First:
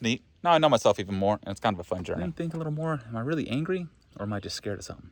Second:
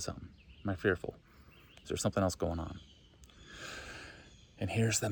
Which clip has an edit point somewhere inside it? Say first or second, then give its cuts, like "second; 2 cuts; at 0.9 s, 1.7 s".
first; 1 cut; at 2.2 s